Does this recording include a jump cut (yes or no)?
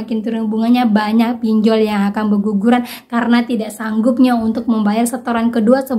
no